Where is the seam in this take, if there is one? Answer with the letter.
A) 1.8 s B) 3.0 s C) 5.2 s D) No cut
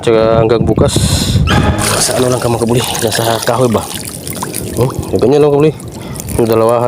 A